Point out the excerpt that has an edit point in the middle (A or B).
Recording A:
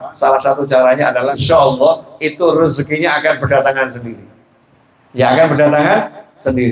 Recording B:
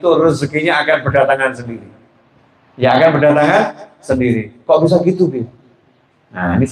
A